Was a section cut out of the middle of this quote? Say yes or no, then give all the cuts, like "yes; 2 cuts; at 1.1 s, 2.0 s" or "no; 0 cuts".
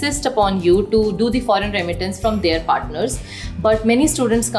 no; 0 cuts